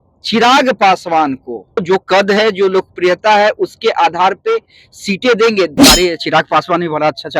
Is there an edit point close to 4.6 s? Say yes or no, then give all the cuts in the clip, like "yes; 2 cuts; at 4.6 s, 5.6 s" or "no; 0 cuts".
no; 2 cuts; at 1.8 s, 5.8 s